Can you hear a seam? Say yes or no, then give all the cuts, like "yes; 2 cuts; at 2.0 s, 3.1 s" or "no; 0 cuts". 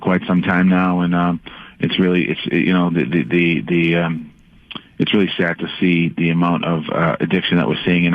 yes; 1 cut; at 6.9 s